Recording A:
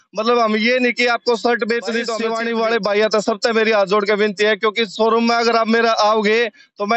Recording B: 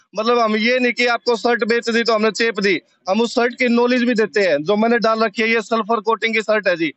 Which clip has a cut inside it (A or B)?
A